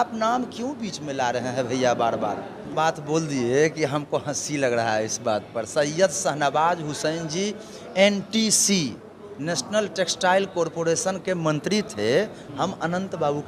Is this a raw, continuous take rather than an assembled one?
no; 2 cuts; at 2.7 s, 12.4 s

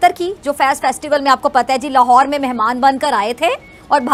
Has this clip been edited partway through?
no; 0 cuts

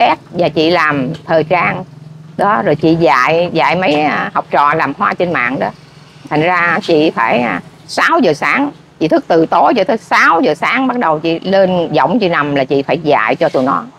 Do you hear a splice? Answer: no; 0 cuts

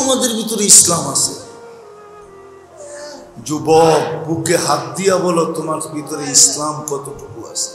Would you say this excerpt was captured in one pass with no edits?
no; 2 cuts; at 1.4 s, 2.8 s

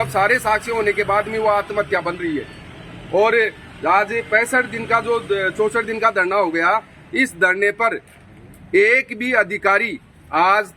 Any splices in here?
no; 0 cuts

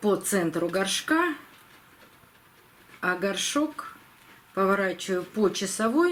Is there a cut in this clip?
no; 0 cuts

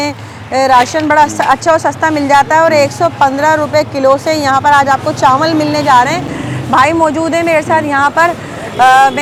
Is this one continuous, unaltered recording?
yes; 0 cuts

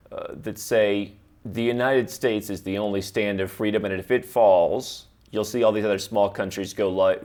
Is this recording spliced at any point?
no; 0 cuts

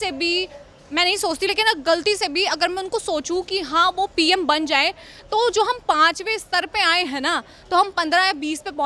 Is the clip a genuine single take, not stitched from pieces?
yes; 0 cuts

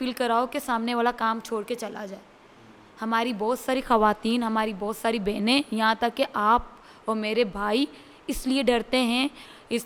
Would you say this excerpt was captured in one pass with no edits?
yes; 0 cuts

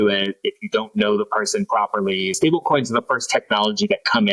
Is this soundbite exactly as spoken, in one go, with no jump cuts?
no; 1 cut; at 2.3 s

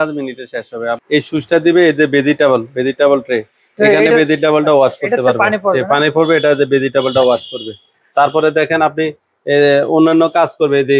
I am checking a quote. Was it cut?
yes; 1 cut; at 1.0 s

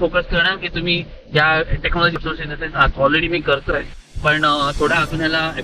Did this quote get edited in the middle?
yes; 1 cut; at 2.2 s

